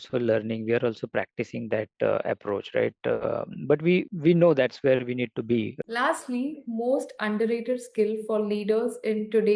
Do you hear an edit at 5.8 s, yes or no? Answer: yes